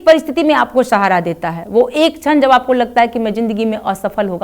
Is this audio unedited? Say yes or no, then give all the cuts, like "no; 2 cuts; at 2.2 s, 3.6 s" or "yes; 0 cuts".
yes; 0 cuts